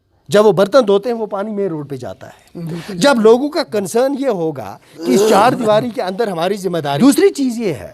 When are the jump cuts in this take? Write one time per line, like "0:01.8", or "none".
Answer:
0:06.9